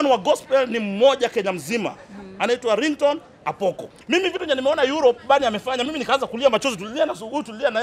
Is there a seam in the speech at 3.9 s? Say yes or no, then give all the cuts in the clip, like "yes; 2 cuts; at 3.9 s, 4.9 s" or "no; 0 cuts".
yes; 1 cut; at 3.9 s